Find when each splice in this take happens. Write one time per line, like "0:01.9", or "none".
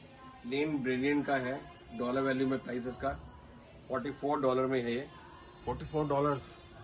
none